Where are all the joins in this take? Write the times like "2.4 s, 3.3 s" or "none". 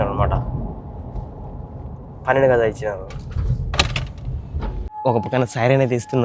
4.8 s